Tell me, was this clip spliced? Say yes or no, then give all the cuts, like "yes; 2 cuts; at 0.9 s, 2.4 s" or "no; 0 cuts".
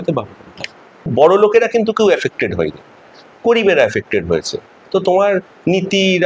yes; 1 cut; at 1.1 s